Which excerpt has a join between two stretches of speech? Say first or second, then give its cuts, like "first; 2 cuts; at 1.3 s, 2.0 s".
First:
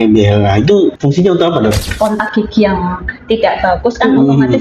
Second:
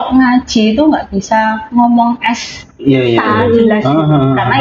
first; 2 cuts; at 1.0 s, 1.9 s